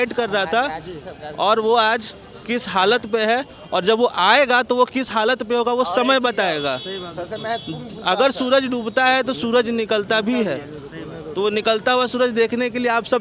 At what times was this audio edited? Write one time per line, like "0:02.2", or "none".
none